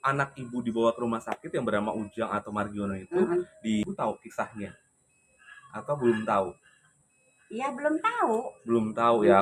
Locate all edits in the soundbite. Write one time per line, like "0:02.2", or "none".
0:03.9

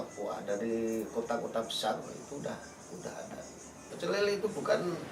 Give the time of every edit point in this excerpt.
0:03.9

